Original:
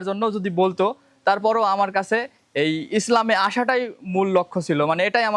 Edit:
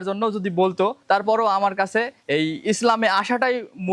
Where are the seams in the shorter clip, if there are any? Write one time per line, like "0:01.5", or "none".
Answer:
0:01.0
0:02.2